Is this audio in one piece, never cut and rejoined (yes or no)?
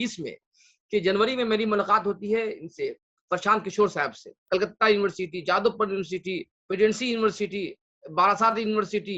no